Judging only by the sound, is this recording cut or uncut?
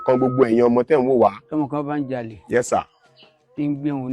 cut